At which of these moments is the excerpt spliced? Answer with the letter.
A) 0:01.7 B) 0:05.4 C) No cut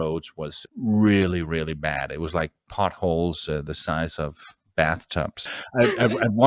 B